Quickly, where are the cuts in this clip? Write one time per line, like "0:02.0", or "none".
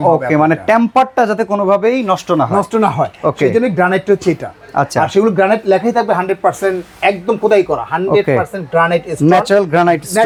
none